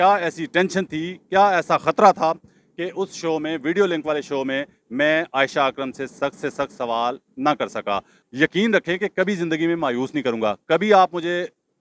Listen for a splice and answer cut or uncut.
cut